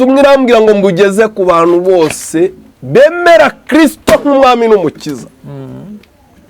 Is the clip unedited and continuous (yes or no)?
yes